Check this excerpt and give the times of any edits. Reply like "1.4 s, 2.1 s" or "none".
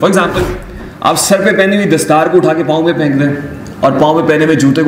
none

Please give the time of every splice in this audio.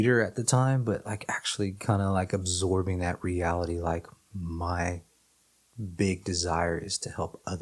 none

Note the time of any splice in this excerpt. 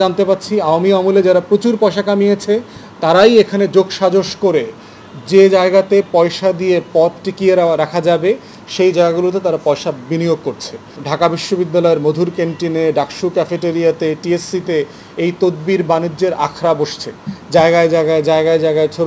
10.9 s

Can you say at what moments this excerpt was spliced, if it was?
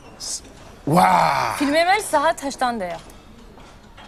none

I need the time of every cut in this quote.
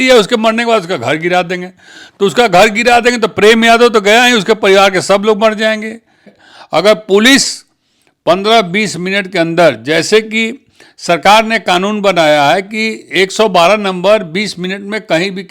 6.3 s

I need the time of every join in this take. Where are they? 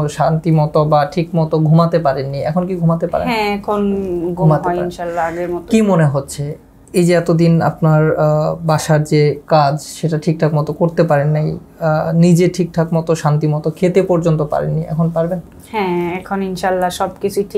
none

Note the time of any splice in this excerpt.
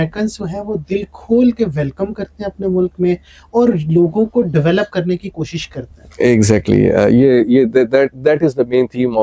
none

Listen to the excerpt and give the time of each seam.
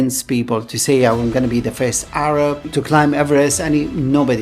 2.7 s

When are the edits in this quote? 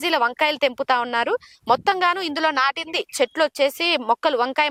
none

